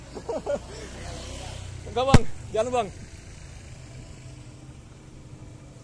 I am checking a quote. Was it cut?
no; 0 cuts

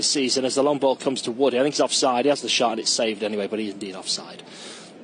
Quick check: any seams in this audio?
yes; 1 cut; at 1.1 s

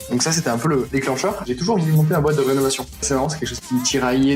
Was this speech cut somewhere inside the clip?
yes; 2 cuts; at 1.4 s, 3.1 s

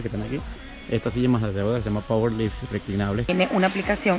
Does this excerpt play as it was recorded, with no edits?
no; 1 cut; at 3.3 s

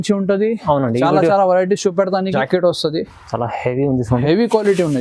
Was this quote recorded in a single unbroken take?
no; 1 cut; at 2.3 s

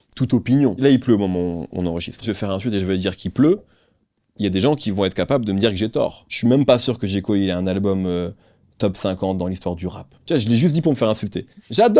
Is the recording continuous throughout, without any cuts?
no; 3 cuts; at 2.2 s, 6.3 s, 10.1 s

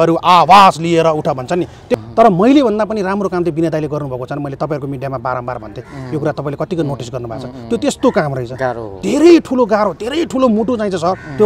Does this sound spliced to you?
yes; 1 cut; at 1.9 s

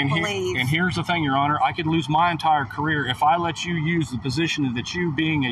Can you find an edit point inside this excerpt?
no; 0 cuts

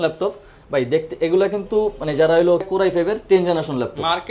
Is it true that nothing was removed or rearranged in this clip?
no; 1 cut; at 2.6 s

